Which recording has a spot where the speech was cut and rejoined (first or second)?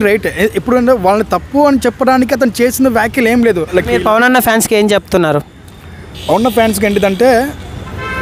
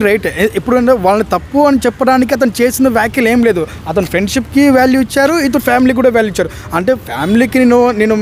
first